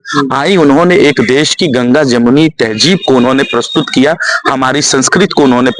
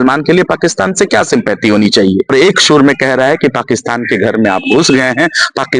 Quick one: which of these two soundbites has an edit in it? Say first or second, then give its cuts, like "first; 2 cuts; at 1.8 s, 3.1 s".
second; 1 cut; at 2.3 s